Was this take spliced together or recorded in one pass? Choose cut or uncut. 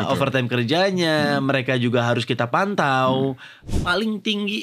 cut